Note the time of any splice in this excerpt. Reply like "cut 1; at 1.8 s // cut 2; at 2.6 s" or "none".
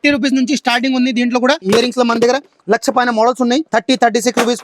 cut 1; at 1.6 s // cut 2; at 3.7 s

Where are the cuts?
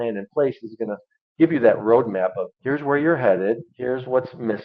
cut 1; at 2.5 s // cut 2; at 3.7 s

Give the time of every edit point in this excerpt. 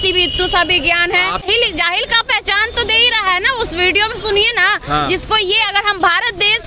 cut 1; at 1.4 s

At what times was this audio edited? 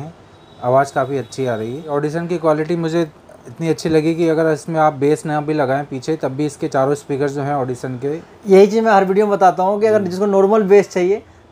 cut 1; at 1.9 s

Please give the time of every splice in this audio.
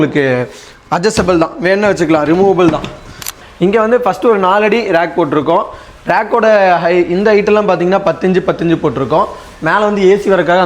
cut 1; at 3.4 s

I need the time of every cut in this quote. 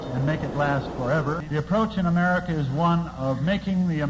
cut 1; at 1.4 s

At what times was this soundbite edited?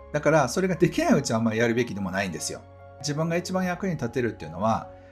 cut 1; at 3.0 s

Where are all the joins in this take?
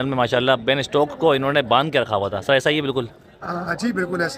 none

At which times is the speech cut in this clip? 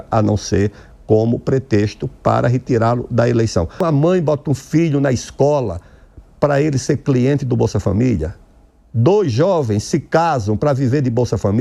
cut 1; at 3.8 s

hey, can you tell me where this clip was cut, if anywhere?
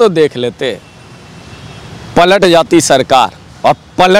none

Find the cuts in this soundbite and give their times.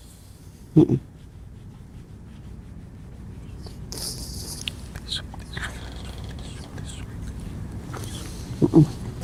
none

